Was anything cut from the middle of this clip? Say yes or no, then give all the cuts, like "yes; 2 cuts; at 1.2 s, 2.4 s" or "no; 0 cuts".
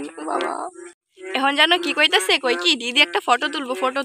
yes; 1 cut; at 1.1 s